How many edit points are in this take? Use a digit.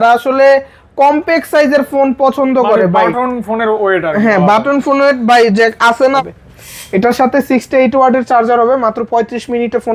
1